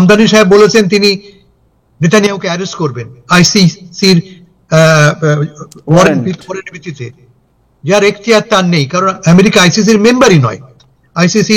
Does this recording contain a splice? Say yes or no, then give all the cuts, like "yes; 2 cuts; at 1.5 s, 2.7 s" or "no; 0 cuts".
no; 0 cuts